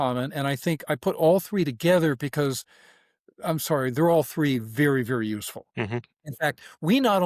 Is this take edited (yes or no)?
yes